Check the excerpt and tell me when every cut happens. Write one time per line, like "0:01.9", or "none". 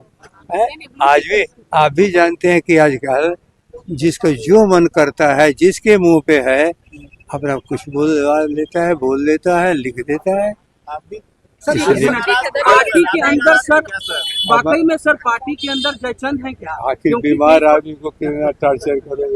none